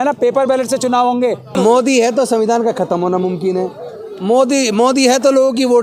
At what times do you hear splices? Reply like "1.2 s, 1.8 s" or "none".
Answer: 1.6 s